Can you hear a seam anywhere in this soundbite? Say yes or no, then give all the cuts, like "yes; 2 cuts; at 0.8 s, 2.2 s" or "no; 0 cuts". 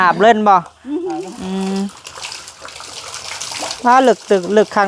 yes; 1 cut; at 1.2 s